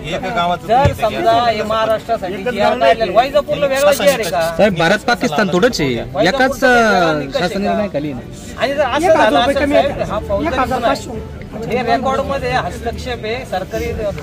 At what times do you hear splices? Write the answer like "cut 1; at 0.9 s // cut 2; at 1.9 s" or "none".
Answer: none